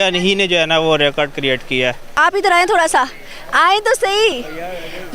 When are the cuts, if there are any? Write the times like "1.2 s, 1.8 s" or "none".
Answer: 2.2 s